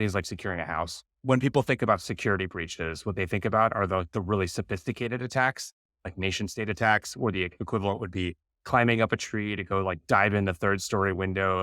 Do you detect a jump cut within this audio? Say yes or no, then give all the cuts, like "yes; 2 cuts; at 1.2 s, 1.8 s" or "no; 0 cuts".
yes; 1 cut; at 1.1 s